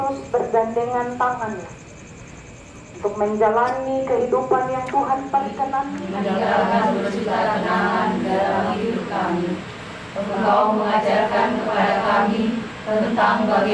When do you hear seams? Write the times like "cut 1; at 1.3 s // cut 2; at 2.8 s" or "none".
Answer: cut 1; at 6.0 s